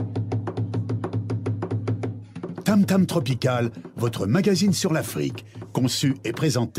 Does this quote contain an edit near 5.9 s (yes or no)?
no